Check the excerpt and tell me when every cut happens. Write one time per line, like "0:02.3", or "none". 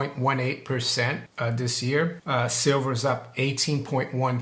0:01.3
0:02.2